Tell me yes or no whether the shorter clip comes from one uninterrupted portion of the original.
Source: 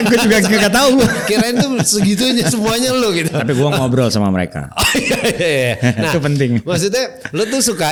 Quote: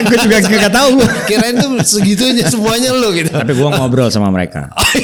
yes